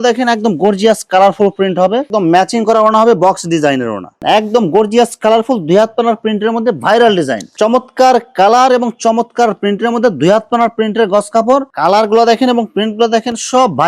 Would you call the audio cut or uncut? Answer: cut